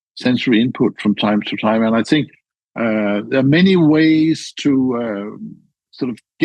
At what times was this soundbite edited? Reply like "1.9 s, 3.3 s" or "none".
2.5 s